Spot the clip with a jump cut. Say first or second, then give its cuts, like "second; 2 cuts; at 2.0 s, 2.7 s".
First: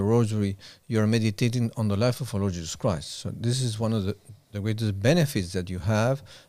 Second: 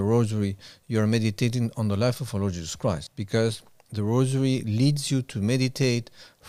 second; 1 cut; at 3.1 s